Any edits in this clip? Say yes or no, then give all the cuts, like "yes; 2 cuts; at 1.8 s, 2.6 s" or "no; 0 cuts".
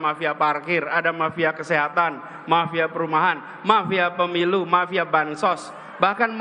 no; 0 cuts